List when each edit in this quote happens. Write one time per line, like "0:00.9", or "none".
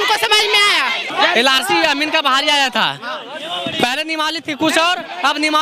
0:01.0